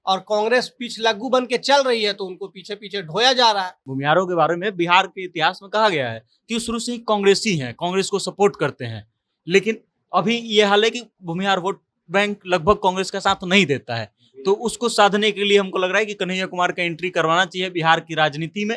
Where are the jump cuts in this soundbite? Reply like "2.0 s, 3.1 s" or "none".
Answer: 3.8 s